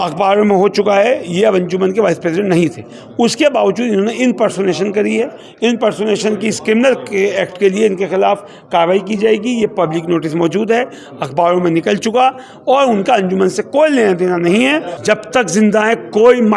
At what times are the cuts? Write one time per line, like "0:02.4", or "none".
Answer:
0:14.9